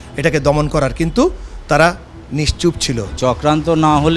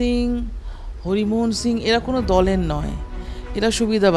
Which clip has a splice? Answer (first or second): first